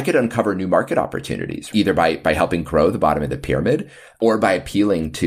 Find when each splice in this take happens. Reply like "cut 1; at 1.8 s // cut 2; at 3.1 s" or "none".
cut 1; at 1.7 s // cut 2; at 4.2 s